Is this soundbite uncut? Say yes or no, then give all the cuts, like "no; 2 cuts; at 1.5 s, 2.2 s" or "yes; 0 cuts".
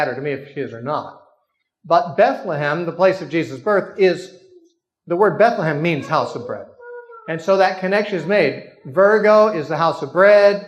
no; 1 cut; at 1.3 s